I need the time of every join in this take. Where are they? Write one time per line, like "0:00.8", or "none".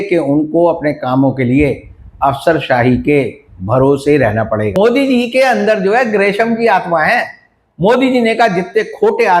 0:04.7